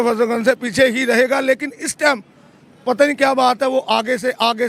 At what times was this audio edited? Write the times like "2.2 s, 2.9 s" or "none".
none